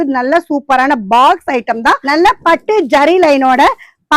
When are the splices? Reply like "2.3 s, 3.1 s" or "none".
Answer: 2.0 s